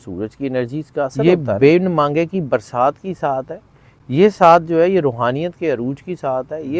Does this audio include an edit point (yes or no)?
yes